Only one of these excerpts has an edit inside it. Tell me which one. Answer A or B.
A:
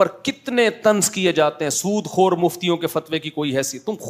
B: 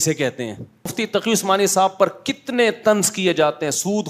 B